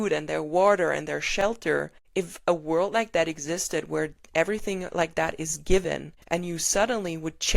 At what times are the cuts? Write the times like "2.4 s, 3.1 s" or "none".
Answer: 2.0 s, 6.1 s